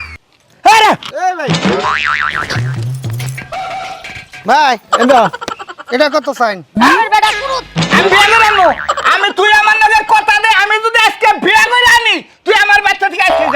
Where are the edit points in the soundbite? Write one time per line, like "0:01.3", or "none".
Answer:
0:06.7